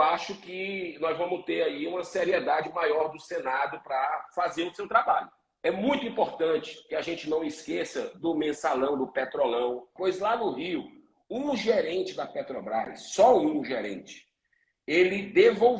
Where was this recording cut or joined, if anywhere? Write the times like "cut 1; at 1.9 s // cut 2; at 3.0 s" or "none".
cut 1; at 5.5 s // cut 2; at 9.9 s